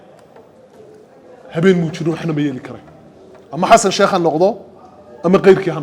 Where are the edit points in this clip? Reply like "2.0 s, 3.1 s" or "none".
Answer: none